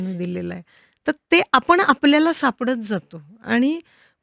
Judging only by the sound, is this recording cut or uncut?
uncut